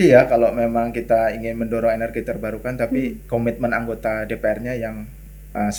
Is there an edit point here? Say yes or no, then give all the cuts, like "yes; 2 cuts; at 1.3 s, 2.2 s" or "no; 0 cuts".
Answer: no; 0 cuts